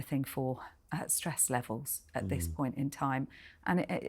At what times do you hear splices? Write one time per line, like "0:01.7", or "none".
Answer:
none